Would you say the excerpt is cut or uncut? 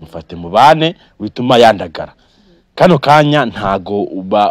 uncut